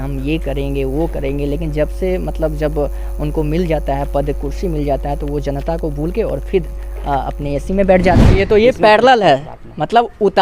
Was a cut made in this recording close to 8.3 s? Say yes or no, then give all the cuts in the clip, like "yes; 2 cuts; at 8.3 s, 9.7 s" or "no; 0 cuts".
yes; 1 cut; at 8.3 s